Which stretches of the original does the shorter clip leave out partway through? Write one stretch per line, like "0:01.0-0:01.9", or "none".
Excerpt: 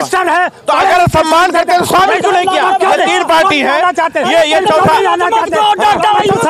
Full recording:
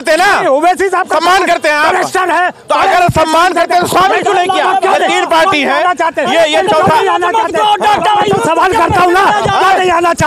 none